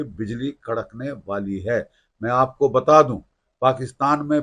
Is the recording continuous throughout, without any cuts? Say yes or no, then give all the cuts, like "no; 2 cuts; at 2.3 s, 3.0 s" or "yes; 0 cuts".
yes; 0 cuts